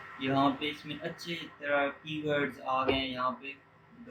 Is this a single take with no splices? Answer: yes; 0 cuts

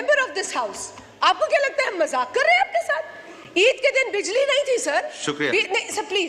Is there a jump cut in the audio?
no; 0 cuts

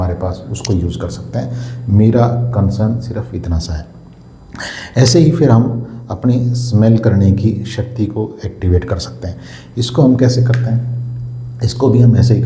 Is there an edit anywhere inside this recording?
no; 0 cuts

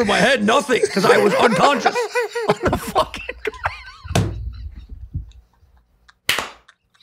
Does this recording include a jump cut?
no; 0 cuts

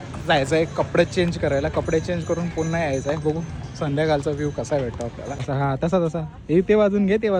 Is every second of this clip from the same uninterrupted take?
no; 1 cut; at 5.5 s

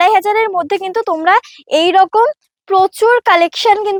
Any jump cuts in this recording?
no; 0 cuts

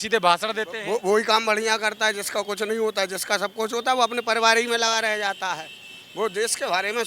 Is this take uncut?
yes; 0 cuts

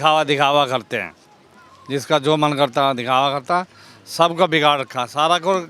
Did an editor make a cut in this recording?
no; 0 cuts

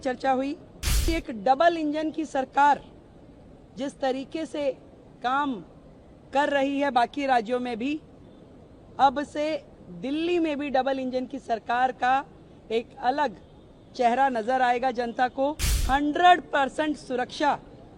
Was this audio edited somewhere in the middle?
yes; 2 cuts; at 1.1 s, 15.8 s

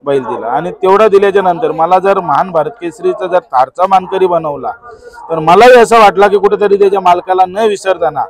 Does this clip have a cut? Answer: no; 0 cuts

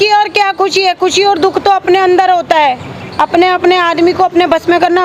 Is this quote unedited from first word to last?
yes; 0 cuts

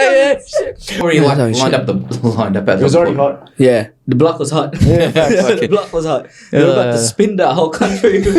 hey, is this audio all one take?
no; 1 cut; at 1.0 s

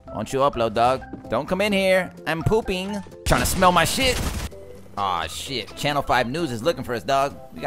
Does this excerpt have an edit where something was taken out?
yes; 3 cuts; at 1.1 s, 3.1 s, 4.5 s

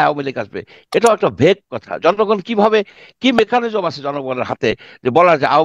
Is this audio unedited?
yes; 0 cuts

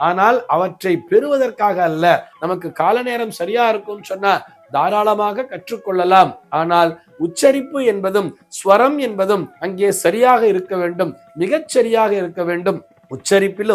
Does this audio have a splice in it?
yes; 1 cut; at 2.3 s

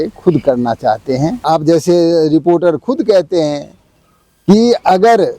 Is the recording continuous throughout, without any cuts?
no; 1 cut; at 1.4 s

